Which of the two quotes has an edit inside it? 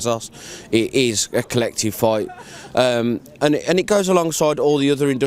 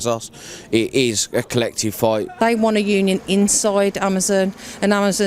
second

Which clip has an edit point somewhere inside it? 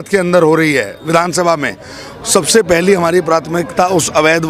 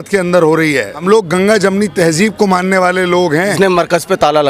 second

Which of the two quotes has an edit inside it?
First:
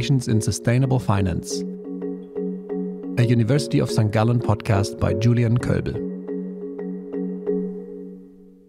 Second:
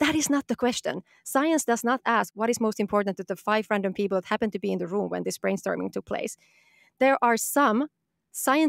second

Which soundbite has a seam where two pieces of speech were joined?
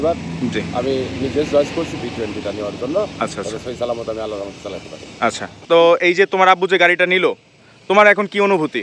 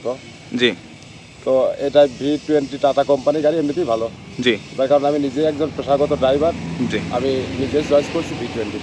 first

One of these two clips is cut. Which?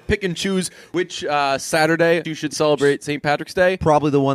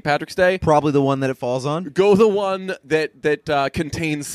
first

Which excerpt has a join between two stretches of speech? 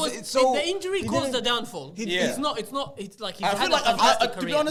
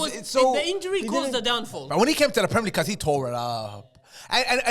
second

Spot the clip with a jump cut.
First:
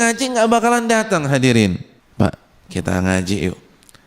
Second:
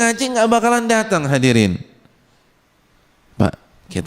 first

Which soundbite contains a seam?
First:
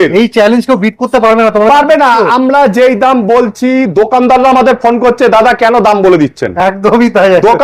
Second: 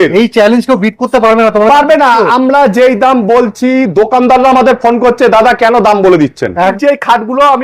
second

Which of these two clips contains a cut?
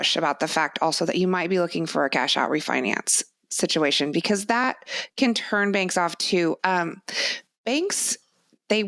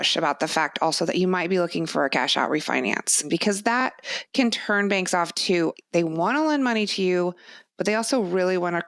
second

